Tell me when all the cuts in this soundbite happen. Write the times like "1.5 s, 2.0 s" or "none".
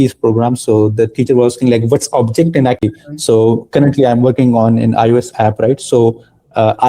2.8 s